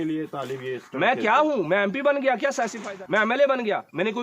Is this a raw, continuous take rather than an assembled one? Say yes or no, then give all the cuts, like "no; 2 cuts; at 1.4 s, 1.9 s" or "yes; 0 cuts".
no; 1 cut; at 2.8 s